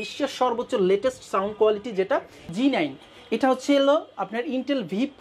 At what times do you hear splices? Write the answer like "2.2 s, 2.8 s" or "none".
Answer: 2.5 s

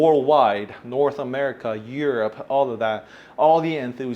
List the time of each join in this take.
none

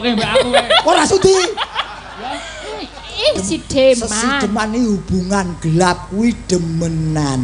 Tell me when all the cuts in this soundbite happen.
3.4 s

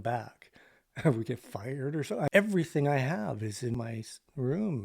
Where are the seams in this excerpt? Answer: 2.3 s, 3.7 s

